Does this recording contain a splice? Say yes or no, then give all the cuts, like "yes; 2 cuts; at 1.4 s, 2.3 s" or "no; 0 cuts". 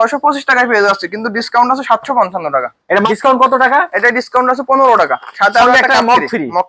yes; 1 cut; at 3.1 s